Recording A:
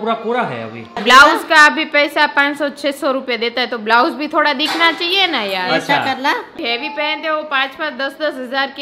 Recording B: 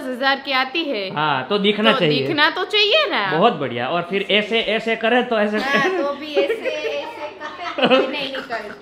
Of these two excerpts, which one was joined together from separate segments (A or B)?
A